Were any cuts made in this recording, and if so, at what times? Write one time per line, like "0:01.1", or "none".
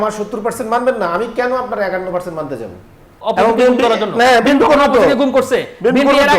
0:03.2